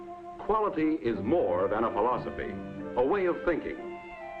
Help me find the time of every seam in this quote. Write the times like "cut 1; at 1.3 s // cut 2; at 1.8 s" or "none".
cut 1; at 2.5 s